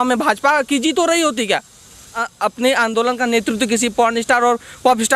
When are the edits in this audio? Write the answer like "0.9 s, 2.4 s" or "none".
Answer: 2.2 s